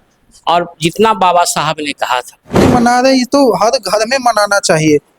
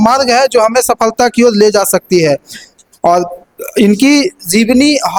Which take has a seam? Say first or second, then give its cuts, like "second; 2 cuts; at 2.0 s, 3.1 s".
first; 1 cut; at 2.7 s